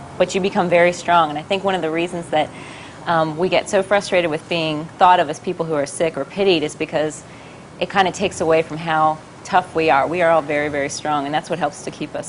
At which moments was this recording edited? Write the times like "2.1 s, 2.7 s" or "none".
7.6 s